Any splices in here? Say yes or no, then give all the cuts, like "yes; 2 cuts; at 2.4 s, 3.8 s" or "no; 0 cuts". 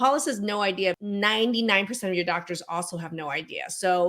yes; 1 cut; at 1.0 s